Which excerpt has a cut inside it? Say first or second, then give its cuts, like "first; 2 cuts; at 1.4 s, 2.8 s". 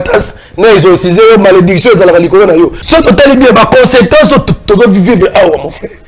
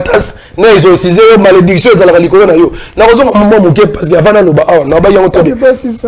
first; 1 cut; at 2.8 s